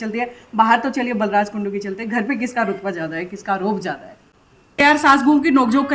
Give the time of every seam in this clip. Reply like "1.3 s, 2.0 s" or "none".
4.8 s